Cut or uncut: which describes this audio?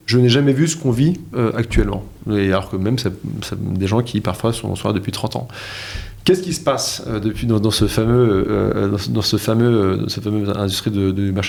uncut